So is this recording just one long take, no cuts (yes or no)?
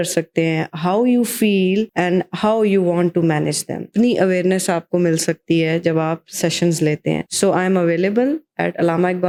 yes